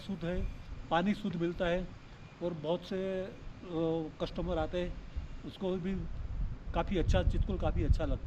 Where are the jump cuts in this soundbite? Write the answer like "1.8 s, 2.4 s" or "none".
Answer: none